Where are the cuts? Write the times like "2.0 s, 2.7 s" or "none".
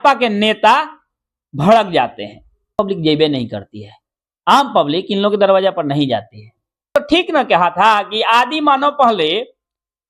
2.8 s, 6.9 s